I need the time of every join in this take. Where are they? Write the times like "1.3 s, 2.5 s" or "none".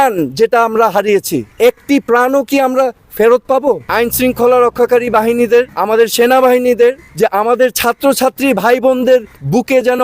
1.4 s, 3.9 s, 5.8 s, 7.1 s